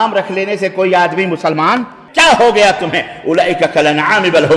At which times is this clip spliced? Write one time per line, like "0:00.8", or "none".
0:02.0